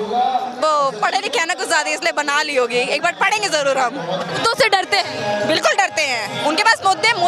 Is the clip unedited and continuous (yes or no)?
no